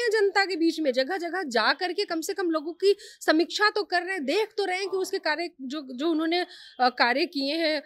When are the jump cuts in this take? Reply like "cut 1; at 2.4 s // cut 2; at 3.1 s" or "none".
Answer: none